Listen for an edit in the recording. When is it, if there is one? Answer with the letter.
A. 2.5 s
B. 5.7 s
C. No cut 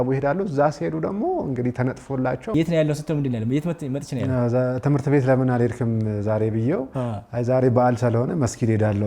A